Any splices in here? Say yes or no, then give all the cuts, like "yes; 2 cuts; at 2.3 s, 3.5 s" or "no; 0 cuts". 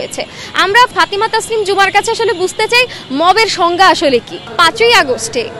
yes; 2 cuts; at 0.9 s, 4.5 s